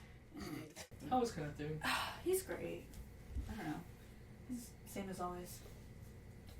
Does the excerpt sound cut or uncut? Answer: cut